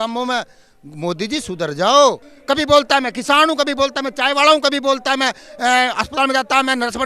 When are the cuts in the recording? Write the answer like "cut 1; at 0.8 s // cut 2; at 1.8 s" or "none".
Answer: cut 1; at 2.3 s